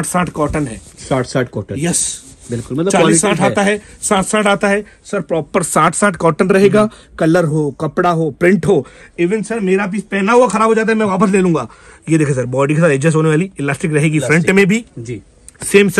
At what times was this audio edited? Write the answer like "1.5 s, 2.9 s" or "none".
none